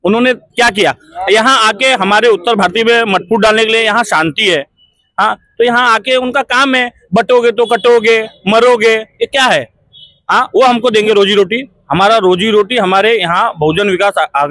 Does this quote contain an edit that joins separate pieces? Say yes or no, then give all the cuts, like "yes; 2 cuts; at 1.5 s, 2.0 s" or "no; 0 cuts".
no; 0 cuts